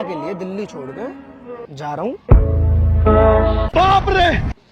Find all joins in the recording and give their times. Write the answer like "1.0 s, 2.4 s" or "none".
3.6 s